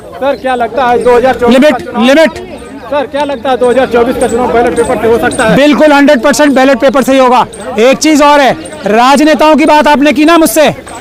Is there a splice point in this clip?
no; 0 cuts

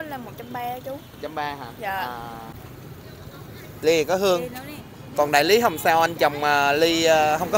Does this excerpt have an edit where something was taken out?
yes; 1 cut; at 2.6 s

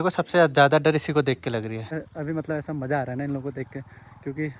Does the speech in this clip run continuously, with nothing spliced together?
no; 1 cut; at 2.0 s

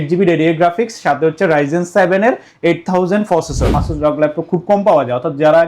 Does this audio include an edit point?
yes; 1 cut; at 3.8 s

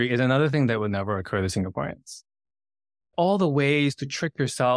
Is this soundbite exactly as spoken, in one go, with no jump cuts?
no; 1 cut; at 3.1 s

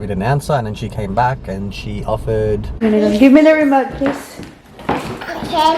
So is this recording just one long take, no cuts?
no; 1 cut; at 2.8 s

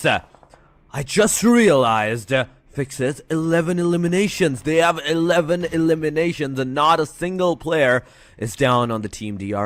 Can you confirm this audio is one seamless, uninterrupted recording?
yes; 0 cuts

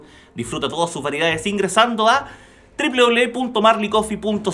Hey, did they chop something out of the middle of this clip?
no; 0 cuts

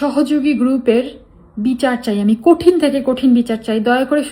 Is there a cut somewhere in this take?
no; 0 cuts

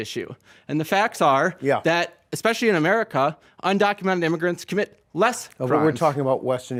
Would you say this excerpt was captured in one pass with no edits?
yes; 0 cuts

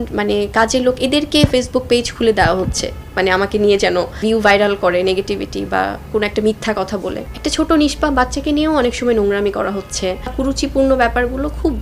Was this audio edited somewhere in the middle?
yes; 3 cuts; at 4.2 s, 7.3 s, 10.3 s

